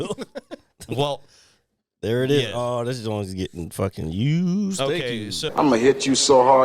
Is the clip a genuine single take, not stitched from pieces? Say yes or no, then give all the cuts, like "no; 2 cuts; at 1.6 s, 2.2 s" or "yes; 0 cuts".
no; 1 cut; at 5.5 s